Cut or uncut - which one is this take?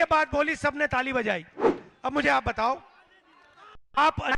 cut